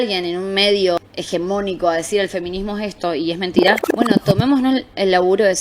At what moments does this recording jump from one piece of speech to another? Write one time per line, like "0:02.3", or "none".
0:01.0
0:03.9